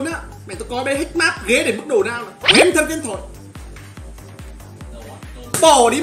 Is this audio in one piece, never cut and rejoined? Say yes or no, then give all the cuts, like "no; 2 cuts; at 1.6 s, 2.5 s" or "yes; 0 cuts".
no; 1 cut; at 2.3 s